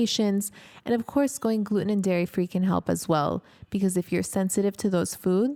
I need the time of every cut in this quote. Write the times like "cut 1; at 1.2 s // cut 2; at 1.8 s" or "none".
none